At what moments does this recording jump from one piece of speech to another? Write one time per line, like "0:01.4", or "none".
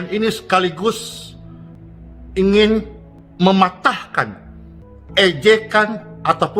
none